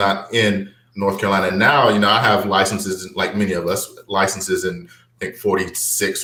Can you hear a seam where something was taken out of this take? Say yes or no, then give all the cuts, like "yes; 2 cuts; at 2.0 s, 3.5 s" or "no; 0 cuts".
no; 0 cuts